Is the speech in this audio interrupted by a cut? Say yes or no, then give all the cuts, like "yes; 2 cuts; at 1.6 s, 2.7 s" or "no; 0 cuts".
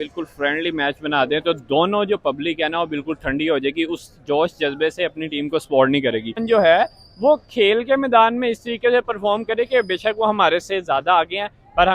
yes; 1 cut; at 6.4 s